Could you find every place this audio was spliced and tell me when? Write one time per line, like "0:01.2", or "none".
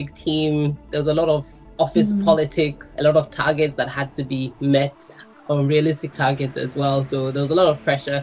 0:02.8